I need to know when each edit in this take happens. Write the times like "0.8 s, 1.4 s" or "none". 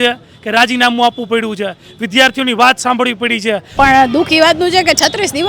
3.7 s